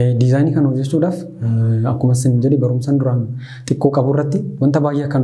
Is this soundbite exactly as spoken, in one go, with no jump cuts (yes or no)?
yes